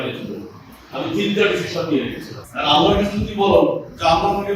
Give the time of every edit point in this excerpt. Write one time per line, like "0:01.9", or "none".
0:02.4